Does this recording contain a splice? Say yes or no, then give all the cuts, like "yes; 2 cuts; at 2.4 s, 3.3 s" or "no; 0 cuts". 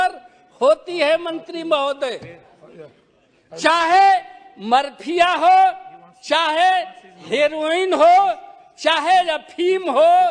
no; 0 cuts